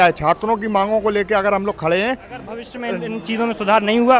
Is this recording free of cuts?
no; 1 cut; at 2.7 s

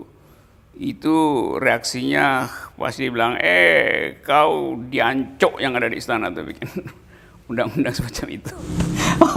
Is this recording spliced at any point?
no; 0 cuts

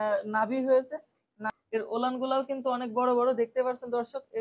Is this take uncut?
no; 1 cut; at 1.4 s

